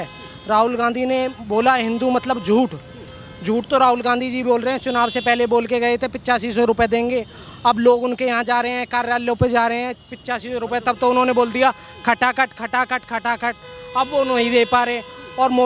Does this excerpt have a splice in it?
no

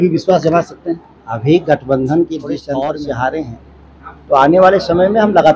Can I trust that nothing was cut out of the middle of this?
no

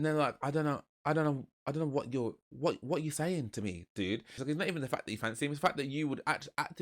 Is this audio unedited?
no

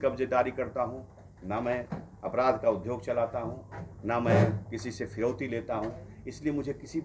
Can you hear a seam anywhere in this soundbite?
no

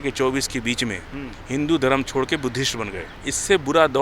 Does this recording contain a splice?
yes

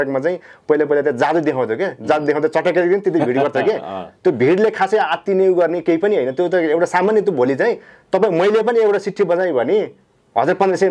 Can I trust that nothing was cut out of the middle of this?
yes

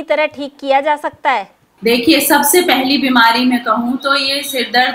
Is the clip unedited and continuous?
no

